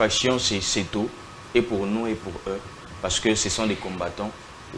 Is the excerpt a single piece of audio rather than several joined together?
yes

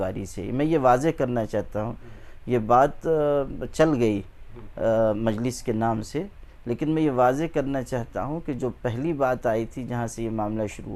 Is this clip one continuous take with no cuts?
yes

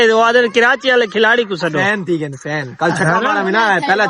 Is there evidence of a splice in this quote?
no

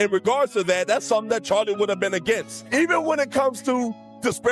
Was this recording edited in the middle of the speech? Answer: yes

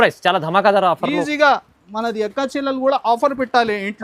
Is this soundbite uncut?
yes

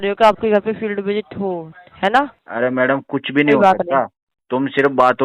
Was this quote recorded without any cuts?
no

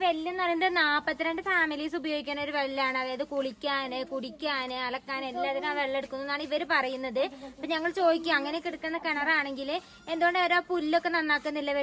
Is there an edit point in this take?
no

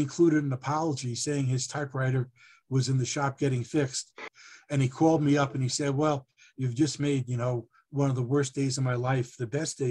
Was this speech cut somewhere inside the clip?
yes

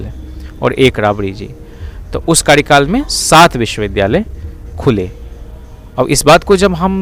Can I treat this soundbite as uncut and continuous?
yes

